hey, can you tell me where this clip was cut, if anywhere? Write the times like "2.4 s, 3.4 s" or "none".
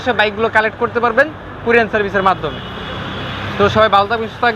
none